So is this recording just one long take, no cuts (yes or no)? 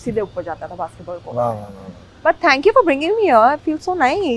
yes